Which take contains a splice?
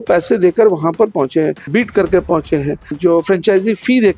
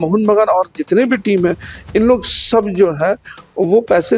first; 2 cuts; at 1.6 s, 3.0 s

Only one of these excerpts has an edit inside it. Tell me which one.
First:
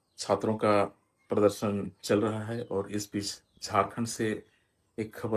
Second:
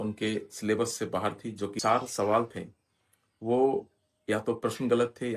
second; 1 cut; at 1.7 s

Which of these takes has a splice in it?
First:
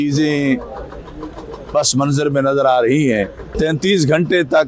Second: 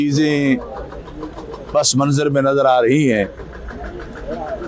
first; 1 cut; at 3.4 s

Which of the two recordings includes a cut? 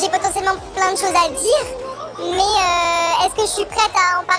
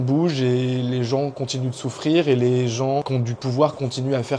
second; 1 cut; at 3.1 s

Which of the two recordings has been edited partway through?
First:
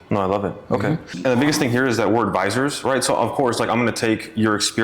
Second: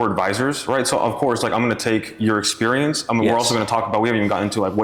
first; 1 cut; at 1.1 s

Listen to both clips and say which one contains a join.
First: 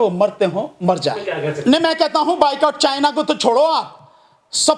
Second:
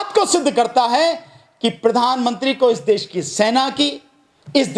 first; 1 cut; at 1.4 s

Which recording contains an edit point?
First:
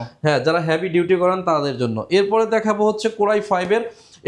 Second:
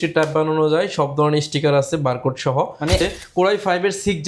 second; 1 cut; at 3.0 s

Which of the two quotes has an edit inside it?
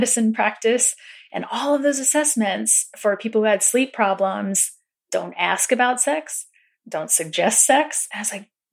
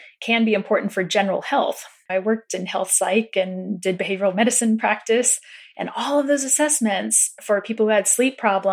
second; 1 cut; at 2.0 s

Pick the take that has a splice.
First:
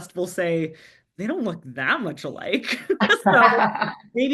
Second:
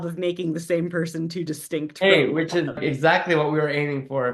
second; 1 cut; at 2.8 s

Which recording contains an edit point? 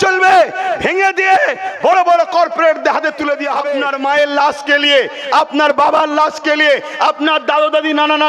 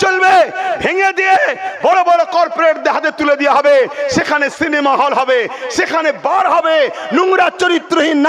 first; 1 cut; at 3.7 s

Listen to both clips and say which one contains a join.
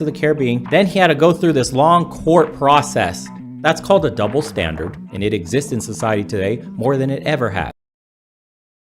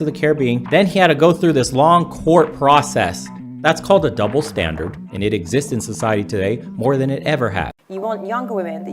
second; 1 cut; at 7.8 s

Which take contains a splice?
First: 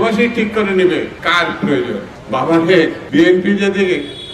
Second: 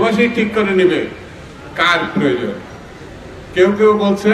first; 3 cuts; at 1.2 s, 2.1 s, 3.0 s

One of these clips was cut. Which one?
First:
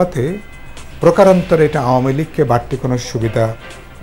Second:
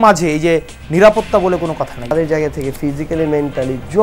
second; 1 cut; at 2.1 s

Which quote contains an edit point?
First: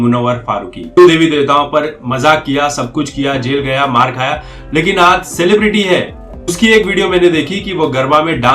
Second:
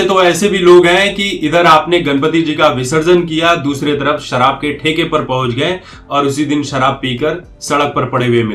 first; 2 cuts; at 0.9 s, 6.5 s

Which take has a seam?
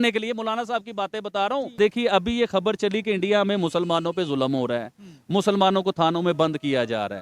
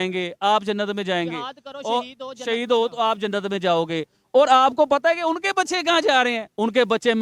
first; 1 cut; at 1.8 s

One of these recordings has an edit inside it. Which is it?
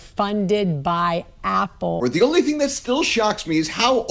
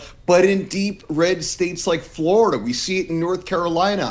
first; 1 cut; at 2.0 s

